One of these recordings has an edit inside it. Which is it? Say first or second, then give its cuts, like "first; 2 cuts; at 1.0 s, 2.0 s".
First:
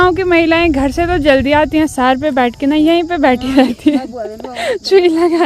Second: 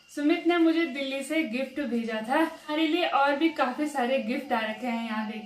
second; 1 cut; at 2.7 s